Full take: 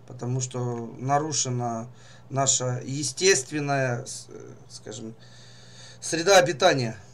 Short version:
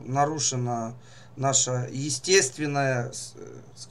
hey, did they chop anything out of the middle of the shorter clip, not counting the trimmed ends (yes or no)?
no